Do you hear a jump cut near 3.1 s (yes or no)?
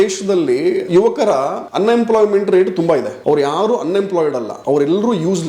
yes